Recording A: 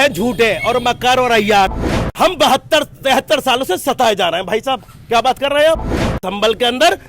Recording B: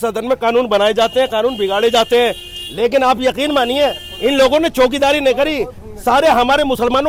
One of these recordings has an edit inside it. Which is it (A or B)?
A